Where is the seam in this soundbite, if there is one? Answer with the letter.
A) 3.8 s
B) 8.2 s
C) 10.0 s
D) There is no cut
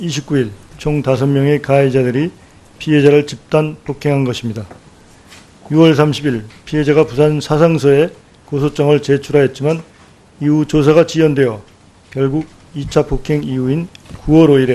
B